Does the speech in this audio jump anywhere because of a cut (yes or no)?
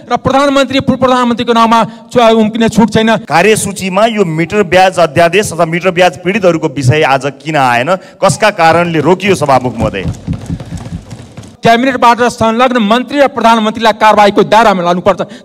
yes